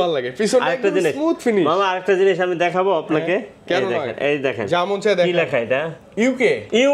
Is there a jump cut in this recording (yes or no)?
no